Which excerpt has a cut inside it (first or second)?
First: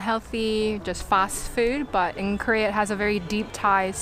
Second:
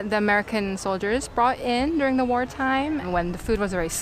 second